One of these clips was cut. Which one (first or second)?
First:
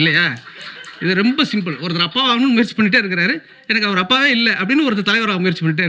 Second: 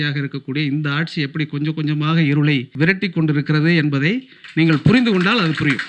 second